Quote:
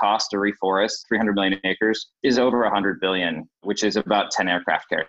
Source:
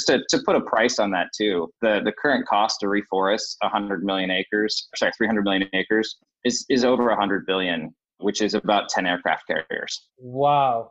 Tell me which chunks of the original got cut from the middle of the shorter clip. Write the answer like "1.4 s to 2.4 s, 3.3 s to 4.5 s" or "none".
3.5 s to 5.1 s, 6.2 s to 6.6 s, 7.9 s to 8.1 s

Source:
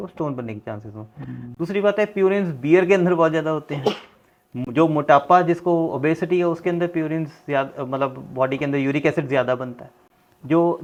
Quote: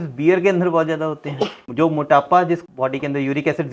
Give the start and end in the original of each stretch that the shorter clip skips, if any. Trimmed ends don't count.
4.1 s to 4.6 s, 5.6 s to 8.2 s

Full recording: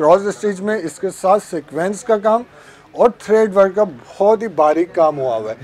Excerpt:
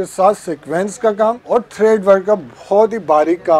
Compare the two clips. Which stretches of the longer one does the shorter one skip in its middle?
2.5 s to 2.9 s

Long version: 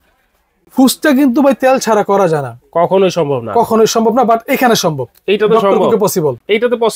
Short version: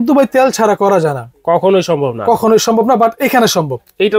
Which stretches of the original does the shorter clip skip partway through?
none

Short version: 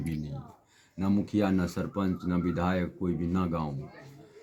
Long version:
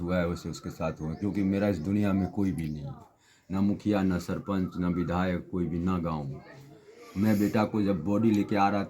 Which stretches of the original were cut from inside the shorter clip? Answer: none

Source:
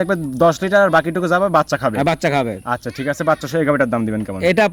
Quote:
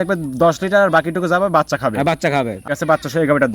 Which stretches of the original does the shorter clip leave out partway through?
2.6 s to 3.0 s

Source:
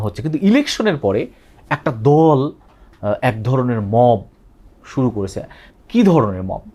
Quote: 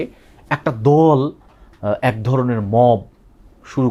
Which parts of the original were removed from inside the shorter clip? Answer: none

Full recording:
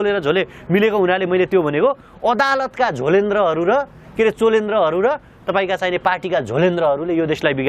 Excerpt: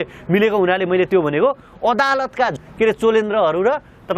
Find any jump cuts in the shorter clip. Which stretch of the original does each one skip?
3.0 s to 3.9 s

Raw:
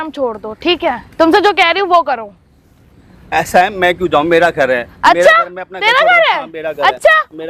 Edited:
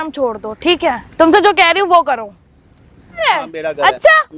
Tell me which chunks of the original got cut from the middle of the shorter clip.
3.2 s to 6.2 s

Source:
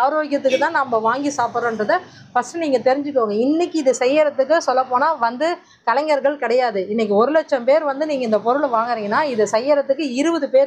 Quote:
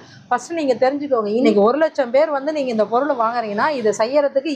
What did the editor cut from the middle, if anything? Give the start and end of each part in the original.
3.5 s to 7.0 s

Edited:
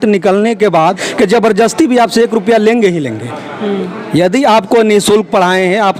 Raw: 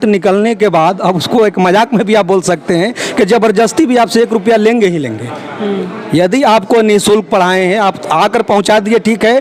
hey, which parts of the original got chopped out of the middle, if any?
1.0 s to 3.0 s

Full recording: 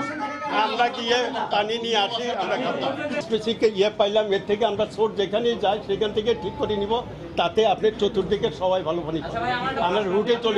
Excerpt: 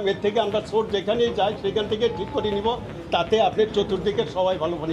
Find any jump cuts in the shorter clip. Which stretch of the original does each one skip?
none

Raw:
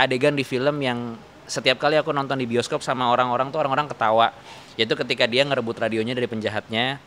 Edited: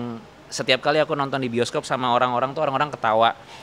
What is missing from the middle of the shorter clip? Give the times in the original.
none

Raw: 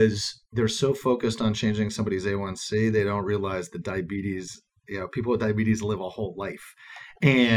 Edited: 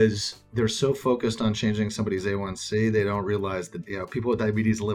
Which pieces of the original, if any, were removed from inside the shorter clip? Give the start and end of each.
3.8 s to 4.8 s

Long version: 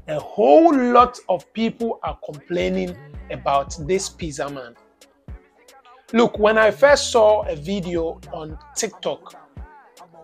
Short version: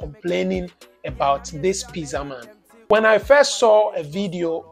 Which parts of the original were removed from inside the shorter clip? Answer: 5.1 s to 6.4 s

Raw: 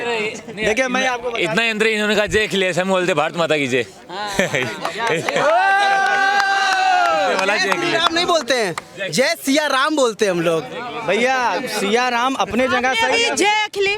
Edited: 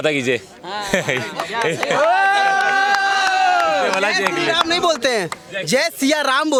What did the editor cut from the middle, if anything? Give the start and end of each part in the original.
none

